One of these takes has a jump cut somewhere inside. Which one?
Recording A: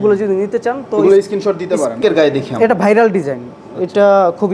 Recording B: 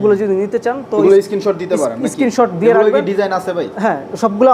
A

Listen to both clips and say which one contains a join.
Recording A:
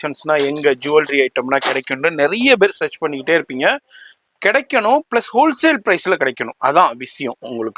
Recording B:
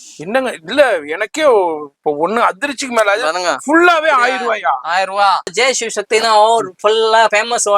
B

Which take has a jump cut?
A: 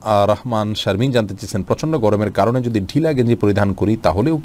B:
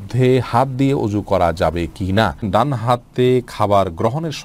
B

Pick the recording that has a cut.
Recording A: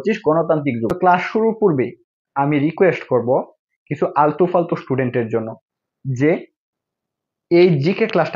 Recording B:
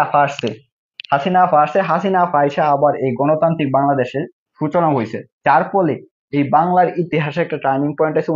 A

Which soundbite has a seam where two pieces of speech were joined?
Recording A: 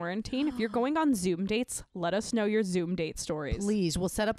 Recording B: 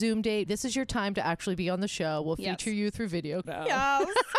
B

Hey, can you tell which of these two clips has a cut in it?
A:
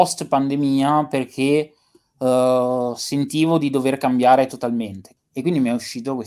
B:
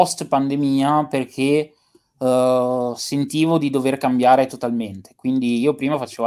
A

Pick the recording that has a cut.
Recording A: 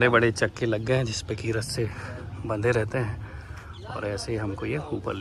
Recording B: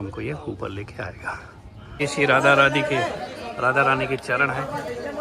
B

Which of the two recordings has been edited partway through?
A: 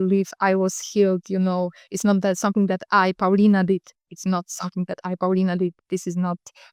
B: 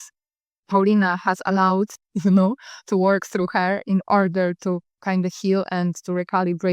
B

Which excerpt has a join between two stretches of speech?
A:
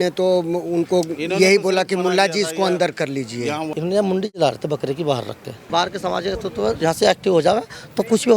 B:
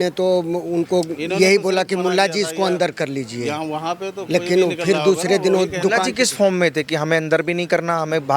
A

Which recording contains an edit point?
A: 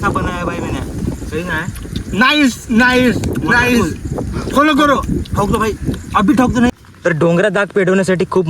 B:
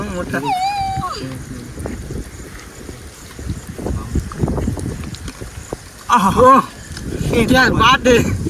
A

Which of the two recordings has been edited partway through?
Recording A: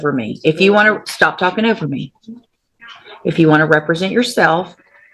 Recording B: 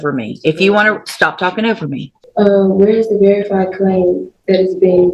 B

